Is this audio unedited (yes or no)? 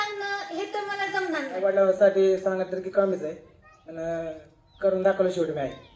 no